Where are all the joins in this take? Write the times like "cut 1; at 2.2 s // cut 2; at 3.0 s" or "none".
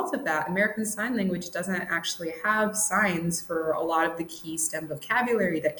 none